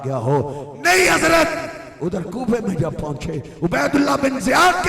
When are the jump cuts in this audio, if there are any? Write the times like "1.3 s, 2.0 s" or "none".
1.8 s